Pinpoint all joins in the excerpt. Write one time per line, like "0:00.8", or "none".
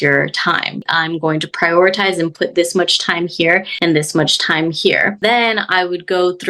0:00.8
0:03.7
0:05.2